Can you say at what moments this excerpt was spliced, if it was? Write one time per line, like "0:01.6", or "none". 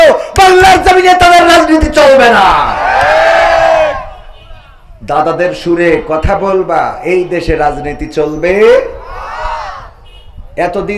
none